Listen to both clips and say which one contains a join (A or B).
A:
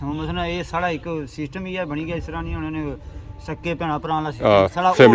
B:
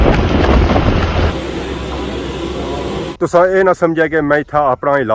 B